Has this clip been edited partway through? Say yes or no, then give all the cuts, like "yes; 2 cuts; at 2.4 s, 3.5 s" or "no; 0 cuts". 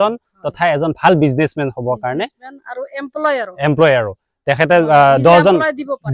no; 0 cuts